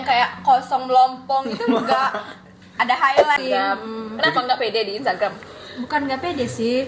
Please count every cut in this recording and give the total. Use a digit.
1